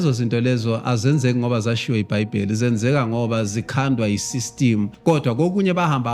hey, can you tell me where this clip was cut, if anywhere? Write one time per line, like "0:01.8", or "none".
0:04.9